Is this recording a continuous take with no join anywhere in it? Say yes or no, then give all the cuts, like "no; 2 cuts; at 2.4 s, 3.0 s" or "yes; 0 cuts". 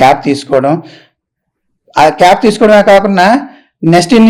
yes; 0 cuts